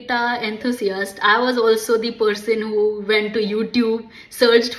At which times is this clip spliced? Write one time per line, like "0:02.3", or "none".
none